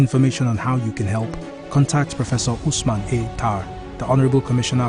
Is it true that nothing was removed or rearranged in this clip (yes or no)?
yes